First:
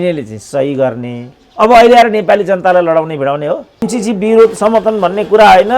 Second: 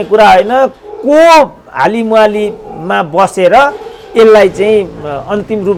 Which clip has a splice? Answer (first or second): first